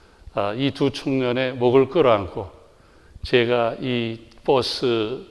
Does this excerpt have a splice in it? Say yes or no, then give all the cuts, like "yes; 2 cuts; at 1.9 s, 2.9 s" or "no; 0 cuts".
no; 0 cuts